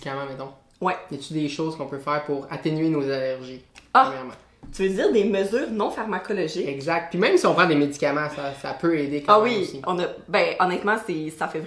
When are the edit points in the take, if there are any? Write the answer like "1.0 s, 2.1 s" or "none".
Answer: none

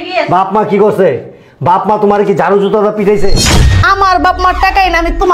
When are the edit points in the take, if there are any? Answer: 3.6 s

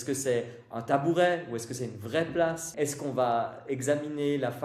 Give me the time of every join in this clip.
2.7 s

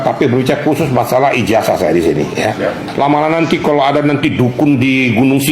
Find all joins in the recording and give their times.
2.8 s

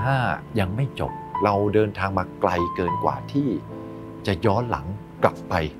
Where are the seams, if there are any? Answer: 1.3 s

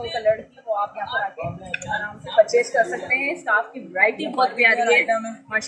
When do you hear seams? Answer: none

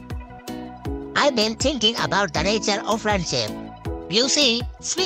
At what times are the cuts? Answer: 1.1 s

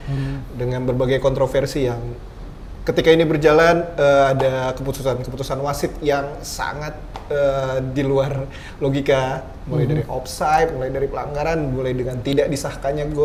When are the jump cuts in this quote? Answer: none

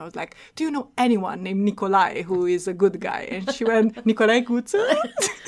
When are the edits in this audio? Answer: none

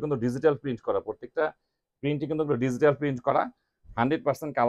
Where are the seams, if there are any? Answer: none

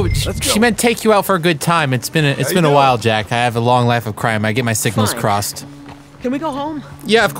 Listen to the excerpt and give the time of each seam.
none

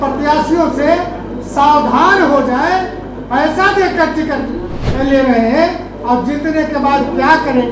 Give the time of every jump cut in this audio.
none

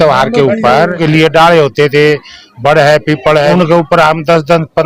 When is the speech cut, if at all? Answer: 1.0 s, 3.5 s

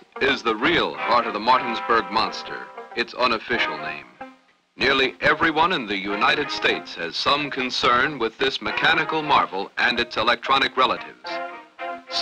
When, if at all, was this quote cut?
none

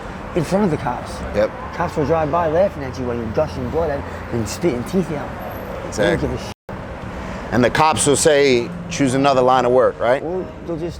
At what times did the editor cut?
none

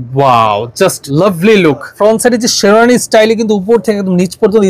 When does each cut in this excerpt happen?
1.0 s, 2.0 s

